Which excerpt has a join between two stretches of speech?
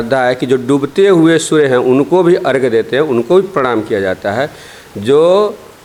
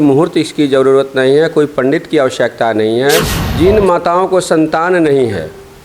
second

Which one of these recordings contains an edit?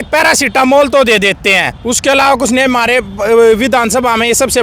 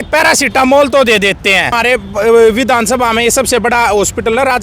second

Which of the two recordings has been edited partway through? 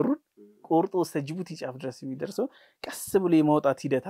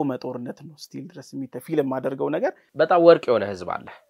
second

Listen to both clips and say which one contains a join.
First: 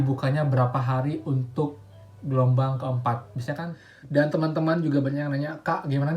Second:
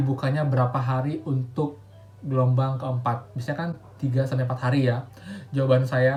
first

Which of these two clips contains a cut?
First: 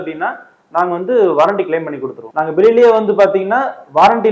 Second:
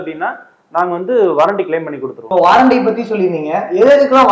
first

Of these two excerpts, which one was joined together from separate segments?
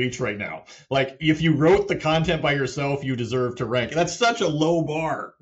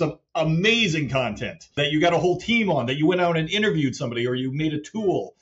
second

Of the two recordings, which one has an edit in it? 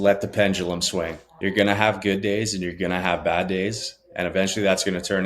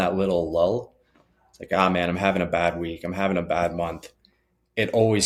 first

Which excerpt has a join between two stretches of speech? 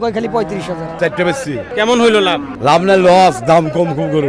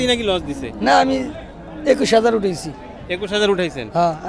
first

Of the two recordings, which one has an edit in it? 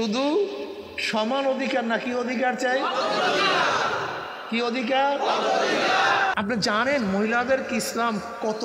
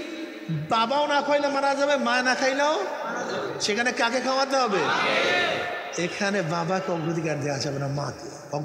first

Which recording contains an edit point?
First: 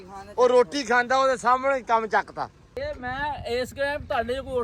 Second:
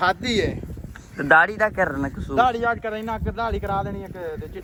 first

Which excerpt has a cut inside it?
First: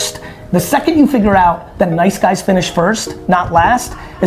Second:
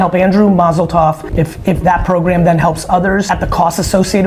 second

